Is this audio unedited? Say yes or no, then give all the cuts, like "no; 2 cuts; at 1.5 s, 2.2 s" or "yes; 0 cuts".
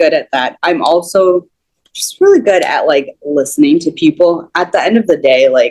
yes; 0 cuts